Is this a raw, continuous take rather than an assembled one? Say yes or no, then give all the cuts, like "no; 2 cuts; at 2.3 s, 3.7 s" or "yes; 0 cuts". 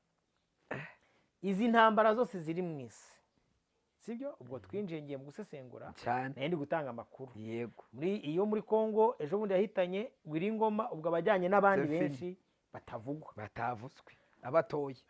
yes; 0 cuts